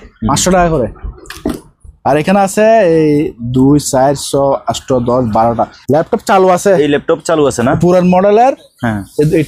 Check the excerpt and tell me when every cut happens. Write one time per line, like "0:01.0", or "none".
0:05.8